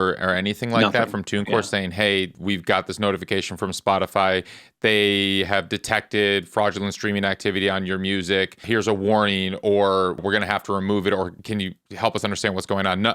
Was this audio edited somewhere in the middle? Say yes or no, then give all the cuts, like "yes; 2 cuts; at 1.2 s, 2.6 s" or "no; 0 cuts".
yes; 4 cuts; at 2.3 s, 8.6 s, 10.2 s, 11.4 s